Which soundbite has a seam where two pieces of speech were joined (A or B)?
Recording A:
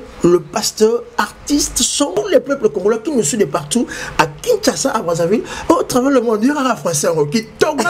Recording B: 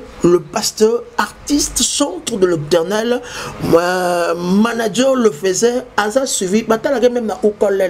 A